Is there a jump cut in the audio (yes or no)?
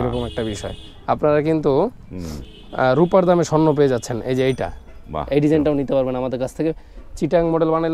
no